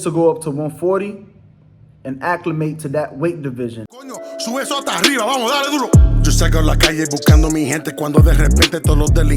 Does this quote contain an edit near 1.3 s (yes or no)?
no